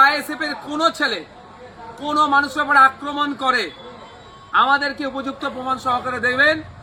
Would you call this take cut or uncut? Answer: uncut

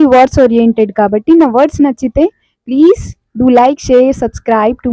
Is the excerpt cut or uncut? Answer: uncut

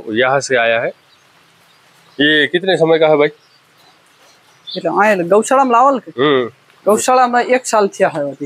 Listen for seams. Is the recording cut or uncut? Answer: uncut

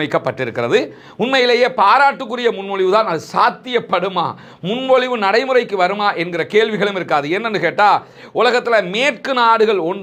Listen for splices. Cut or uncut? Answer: uncut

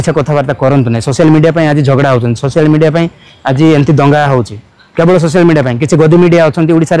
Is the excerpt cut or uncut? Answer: uncut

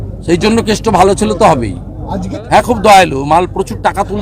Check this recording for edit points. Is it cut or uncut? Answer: cut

